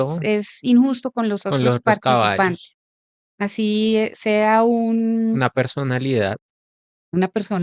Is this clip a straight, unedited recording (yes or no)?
yes